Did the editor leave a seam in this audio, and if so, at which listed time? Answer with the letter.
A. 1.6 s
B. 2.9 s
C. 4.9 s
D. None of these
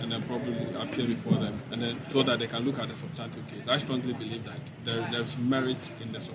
A